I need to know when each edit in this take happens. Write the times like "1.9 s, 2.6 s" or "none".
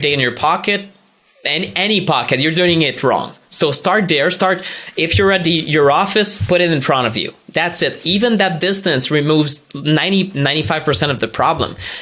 none